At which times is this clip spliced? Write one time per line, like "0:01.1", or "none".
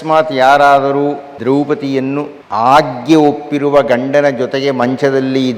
0:01.3
0:02.4